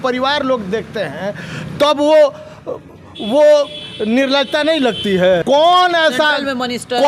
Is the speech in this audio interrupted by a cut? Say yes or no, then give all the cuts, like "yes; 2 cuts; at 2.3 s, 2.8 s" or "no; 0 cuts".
yes; 1 cut; at 5.4 s